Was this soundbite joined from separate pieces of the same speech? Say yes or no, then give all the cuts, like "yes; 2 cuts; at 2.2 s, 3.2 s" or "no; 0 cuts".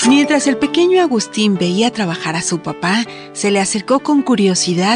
no; 0 cuts